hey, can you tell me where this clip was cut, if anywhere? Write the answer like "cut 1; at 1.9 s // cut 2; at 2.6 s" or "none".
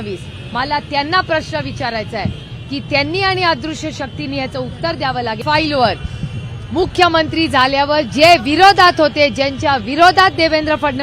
cut 1; at 5.4 s

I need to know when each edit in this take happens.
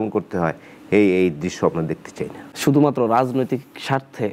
cut 1; at 2.5 s

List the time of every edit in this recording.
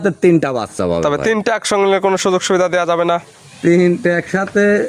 none

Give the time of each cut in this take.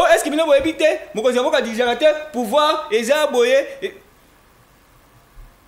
none

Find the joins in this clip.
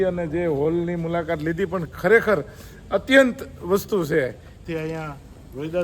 cut 1; at 4.6 s

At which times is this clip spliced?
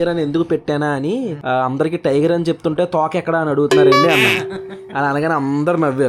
none

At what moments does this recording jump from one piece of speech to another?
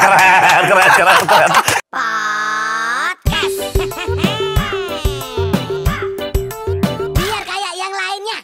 cut 1; at 1.8 s

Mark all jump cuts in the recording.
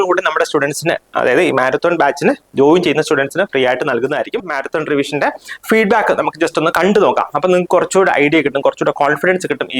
cut 1; at 4.5 s

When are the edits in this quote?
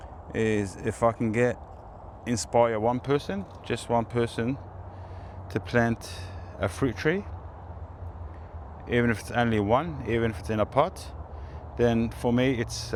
none

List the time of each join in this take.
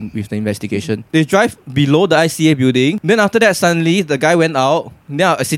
cut 1; at 1.0 s // cut 2; at 3.0 s

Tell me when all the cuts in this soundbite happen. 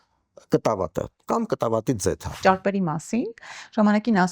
cut 1; at 2.4 s

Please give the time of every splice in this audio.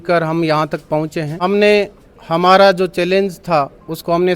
cut 1; at 1.4 s

